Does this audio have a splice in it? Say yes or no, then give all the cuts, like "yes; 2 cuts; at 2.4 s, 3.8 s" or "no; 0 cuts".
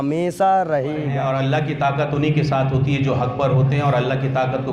yes; 1 cut; at 1.1 s